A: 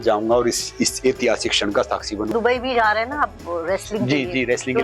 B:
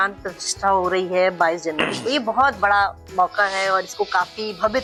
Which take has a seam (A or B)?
A